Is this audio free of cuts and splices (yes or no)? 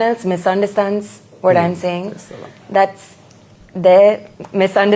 yes